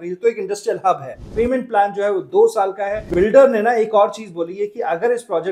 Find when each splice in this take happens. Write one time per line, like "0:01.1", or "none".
0:01.2
0:03.0